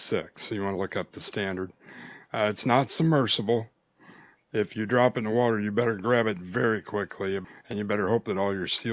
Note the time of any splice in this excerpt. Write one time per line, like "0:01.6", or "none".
0:07.4